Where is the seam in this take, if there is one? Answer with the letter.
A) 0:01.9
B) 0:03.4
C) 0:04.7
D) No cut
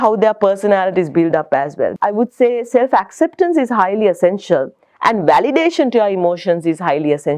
A